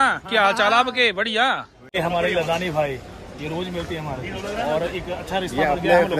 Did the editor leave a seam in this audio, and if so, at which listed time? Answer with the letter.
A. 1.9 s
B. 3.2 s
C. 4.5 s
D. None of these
A